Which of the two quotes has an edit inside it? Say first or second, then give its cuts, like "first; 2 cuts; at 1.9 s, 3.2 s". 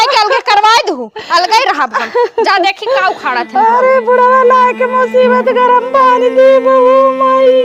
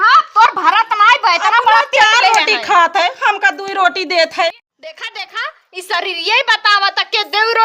second; 1 cut; at 4.7 s